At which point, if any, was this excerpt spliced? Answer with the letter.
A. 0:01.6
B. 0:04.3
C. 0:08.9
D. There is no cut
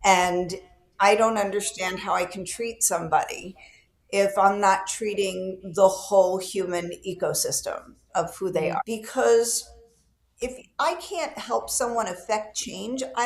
C